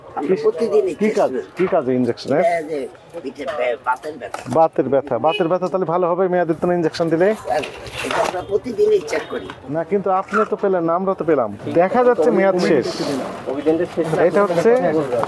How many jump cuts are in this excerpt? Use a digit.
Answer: 3